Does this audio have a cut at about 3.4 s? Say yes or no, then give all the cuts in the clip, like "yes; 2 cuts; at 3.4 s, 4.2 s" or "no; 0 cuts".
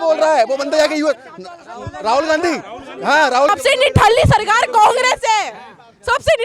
yes; 1 cut; at 3.4 s